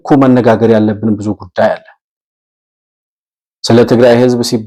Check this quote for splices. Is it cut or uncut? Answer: uncut